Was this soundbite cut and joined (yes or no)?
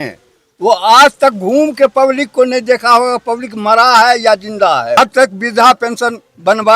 yes